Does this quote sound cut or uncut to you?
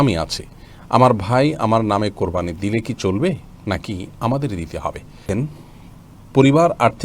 cut